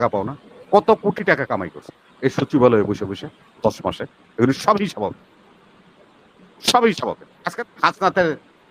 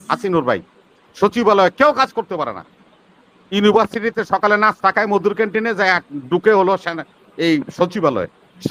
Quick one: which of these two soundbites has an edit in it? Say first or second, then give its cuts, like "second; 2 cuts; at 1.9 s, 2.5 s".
first; 1 cut; at 7.6 s